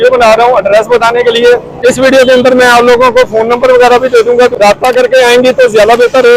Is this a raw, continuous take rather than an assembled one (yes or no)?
no